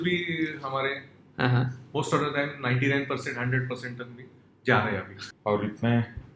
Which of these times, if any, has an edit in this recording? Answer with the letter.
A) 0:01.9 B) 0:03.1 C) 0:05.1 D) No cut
C